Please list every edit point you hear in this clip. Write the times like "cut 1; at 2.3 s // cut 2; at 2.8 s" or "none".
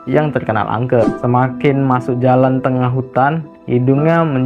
cut 1; at 1.0 s